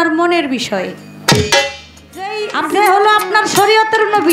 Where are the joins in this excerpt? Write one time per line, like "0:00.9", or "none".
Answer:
0:02.5